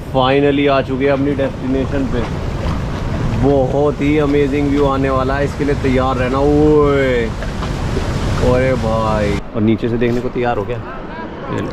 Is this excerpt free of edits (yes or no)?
no